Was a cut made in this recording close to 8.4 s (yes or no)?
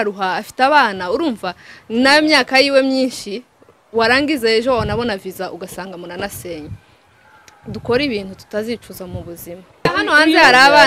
no